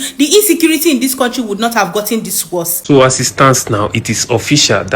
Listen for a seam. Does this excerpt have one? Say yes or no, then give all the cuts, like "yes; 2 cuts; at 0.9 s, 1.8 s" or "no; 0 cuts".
yes; 1 cut; at 2.7 s